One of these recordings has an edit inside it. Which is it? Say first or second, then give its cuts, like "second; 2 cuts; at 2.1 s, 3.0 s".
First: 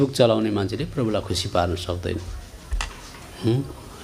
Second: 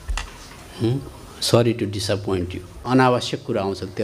second; 1 cut; at 2.7 s